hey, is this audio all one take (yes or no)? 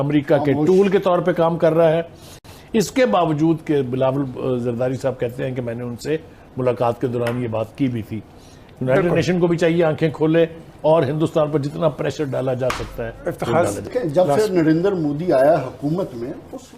no